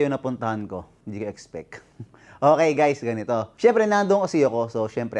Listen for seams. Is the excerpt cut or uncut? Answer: cut